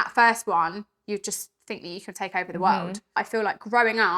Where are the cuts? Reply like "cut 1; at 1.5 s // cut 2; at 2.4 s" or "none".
cut 1; at 3.2 s